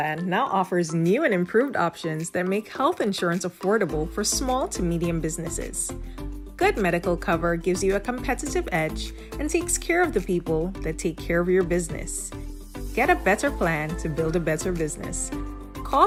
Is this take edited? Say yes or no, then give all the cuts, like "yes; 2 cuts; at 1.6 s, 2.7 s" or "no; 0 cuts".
no; 0 cuts